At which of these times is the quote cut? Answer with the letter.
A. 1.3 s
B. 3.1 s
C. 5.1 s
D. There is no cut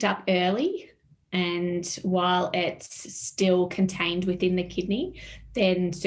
D